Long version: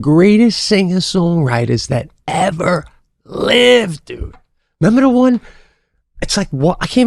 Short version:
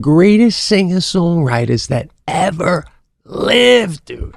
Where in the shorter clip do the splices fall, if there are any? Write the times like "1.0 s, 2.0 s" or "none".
none